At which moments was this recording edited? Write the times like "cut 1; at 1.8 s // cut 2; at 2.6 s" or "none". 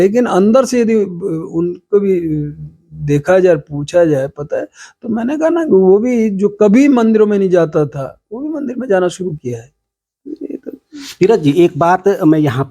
none